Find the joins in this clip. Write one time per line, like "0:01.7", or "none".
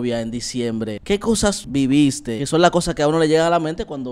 0:01.1
0:02.4